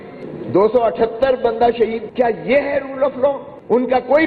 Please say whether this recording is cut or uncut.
cut